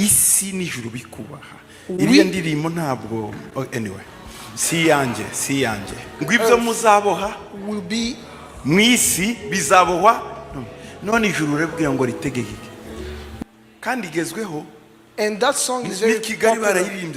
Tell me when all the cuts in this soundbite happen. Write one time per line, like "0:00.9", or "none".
0:06.2
0:13.4